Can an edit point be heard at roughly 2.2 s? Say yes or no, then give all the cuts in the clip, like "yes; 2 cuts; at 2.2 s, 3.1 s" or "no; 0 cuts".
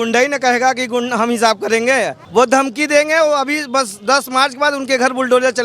yes; 1 cut; at 2.2 s